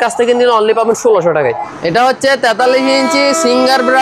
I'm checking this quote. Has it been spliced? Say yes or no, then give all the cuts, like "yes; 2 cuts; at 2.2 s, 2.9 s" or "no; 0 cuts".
yes; 1 cut; at 1.7 s